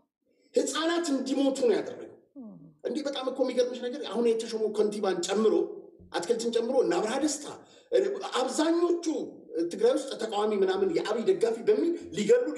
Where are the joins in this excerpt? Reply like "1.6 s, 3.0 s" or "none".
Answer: none